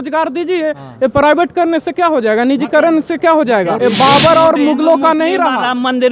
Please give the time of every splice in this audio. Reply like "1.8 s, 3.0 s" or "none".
3.7 s